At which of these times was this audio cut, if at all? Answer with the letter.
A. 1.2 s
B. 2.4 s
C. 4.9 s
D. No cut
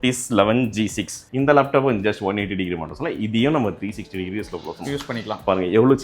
A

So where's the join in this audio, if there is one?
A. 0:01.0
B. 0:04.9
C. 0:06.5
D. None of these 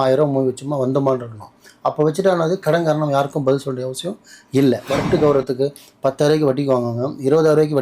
B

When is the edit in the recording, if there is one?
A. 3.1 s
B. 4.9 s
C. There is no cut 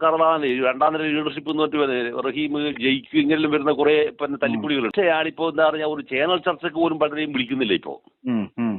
B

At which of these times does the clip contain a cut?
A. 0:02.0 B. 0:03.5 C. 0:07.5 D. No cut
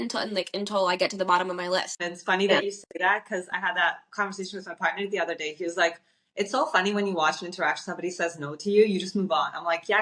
A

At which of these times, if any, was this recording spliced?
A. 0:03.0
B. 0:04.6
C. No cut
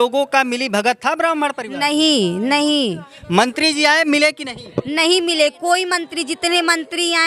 A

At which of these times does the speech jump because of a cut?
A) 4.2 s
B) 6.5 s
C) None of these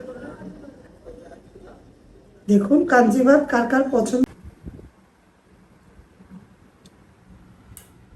A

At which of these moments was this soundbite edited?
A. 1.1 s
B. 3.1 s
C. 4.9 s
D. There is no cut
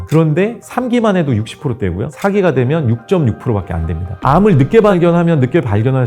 C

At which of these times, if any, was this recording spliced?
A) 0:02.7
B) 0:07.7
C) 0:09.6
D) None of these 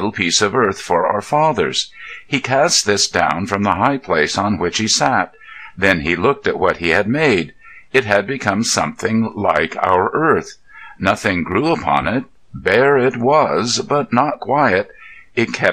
C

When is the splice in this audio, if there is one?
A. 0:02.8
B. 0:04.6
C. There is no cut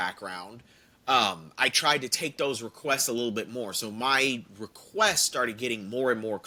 C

